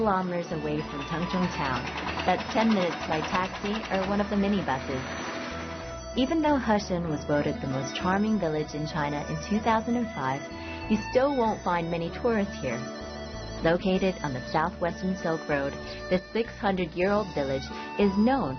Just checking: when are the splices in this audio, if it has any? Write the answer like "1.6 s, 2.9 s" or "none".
10.5 s